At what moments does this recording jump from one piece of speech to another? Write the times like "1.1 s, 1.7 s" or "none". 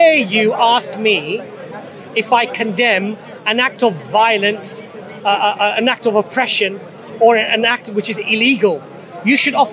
none